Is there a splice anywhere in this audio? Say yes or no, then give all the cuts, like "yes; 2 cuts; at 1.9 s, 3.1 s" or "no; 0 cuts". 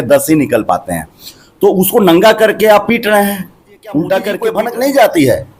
yes; 1 cut; at 4.4 s